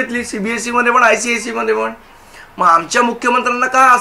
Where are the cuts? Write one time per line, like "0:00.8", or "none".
none